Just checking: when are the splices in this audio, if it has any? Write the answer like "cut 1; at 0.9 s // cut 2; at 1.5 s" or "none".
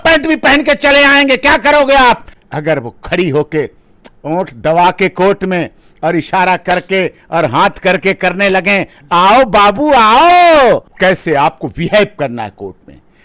cut 1; at 2.3 s // cut 2; at 10.9 s